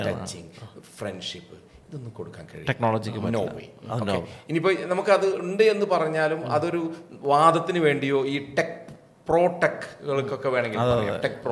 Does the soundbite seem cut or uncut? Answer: uncut